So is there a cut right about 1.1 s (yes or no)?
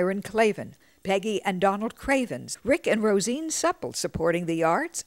no